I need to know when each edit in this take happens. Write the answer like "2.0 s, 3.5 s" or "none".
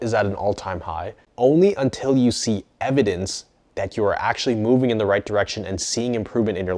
1.2 s